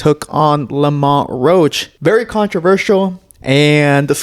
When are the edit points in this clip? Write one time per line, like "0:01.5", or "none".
0:01.9